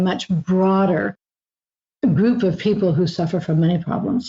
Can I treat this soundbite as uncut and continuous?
no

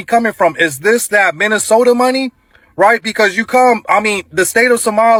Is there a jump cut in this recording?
no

